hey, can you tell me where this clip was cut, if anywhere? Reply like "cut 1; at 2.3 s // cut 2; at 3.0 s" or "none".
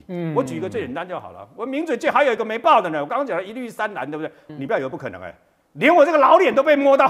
cut 1; at 4.4 s